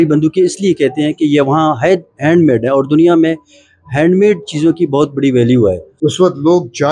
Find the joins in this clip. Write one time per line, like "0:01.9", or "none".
0:05.9